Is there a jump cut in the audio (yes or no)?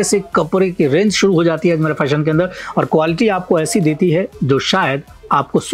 no